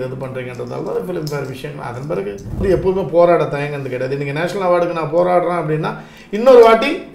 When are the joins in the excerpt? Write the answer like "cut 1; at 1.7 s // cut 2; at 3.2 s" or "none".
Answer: cut 1; at 2.6 s